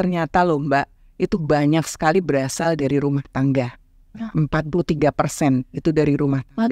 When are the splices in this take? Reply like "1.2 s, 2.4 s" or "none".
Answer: none